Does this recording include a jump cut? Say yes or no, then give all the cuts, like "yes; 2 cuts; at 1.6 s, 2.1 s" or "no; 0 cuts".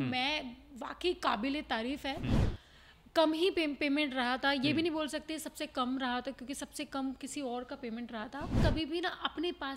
yes; 2 cuts; at 2.5 s, 8.6 s